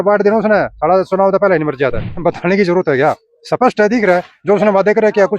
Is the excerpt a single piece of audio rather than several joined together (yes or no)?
no